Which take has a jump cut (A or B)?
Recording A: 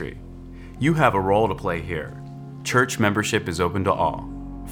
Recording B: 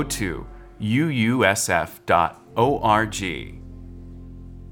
B